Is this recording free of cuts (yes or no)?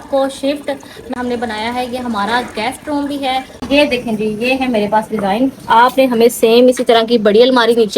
no